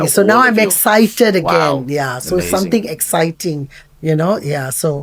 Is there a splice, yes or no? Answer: no